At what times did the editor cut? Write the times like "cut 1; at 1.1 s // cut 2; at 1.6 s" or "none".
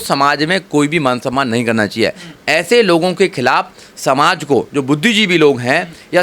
none